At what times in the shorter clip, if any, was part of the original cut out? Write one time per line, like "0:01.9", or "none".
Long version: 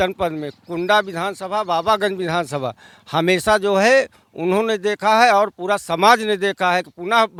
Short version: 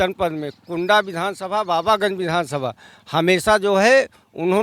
none